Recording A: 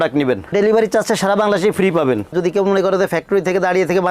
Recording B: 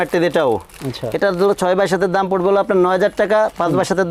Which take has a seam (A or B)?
A